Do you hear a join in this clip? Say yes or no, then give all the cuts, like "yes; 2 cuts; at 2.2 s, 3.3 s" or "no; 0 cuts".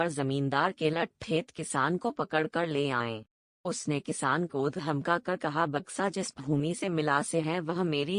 no; 0 cuts